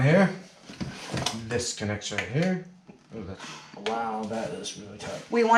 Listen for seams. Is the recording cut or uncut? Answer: uncut